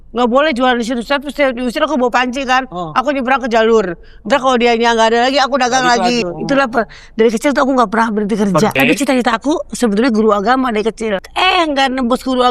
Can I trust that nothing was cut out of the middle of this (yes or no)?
no